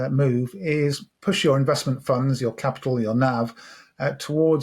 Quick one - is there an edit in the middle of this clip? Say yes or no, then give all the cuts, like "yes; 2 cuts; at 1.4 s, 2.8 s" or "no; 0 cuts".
yes; 1 cut; at 1.1 s